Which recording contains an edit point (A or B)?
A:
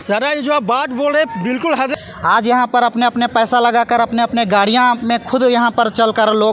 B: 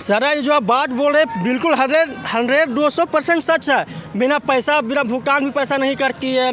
A